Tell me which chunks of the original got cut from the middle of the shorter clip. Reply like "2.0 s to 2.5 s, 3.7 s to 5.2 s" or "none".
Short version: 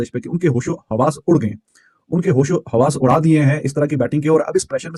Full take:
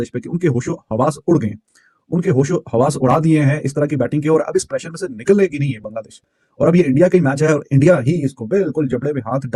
none